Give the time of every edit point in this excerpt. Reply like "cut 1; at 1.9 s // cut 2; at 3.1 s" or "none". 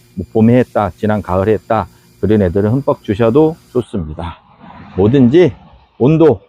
none